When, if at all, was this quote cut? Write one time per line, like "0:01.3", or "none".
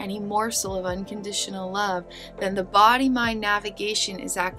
none